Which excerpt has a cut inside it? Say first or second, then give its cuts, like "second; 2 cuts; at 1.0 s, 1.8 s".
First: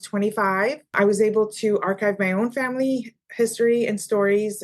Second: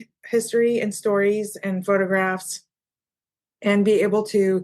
first; 1 cut; at 0.9 s